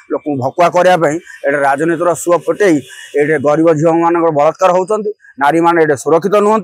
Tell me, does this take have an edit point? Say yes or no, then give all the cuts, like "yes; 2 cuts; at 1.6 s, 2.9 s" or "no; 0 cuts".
no; 0 cuts